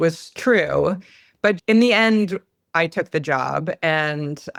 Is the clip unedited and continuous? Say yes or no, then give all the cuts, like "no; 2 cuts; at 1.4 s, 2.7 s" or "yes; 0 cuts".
yes; 0 cuts